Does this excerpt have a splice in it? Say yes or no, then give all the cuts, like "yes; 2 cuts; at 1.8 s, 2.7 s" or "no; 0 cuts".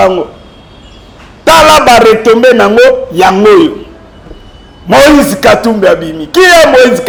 no; 0 cuts